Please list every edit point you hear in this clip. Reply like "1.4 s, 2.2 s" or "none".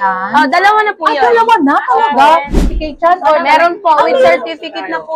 2.7 s